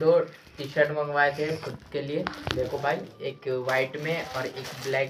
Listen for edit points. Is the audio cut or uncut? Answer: uncut